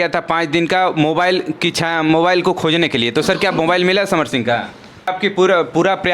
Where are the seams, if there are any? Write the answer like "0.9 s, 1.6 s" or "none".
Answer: 5.1 s